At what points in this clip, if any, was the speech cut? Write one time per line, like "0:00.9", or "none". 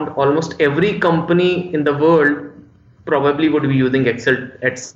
none